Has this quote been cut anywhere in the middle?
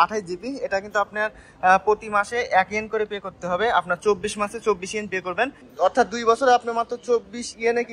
yes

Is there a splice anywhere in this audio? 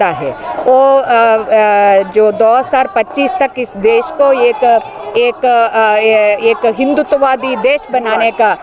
no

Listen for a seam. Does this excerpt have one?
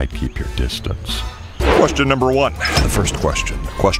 yes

